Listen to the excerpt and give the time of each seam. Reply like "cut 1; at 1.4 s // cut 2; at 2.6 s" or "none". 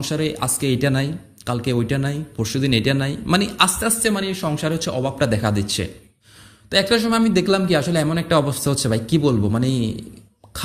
none